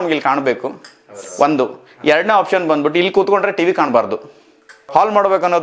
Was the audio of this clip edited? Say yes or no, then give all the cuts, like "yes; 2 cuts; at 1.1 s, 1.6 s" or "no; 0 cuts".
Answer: yes; 1 cut; at 4.6 s